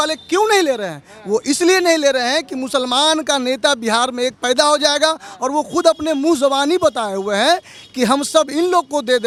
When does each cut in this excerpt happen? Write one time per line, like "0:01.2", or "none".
none